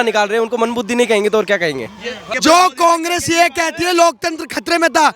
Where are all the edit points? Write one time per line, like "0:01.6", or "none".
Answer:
0:02.2